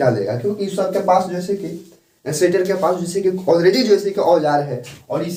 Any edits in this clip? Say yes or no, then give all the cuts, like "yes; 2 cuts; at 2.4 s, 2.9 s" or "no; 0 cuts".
no; 0 cuts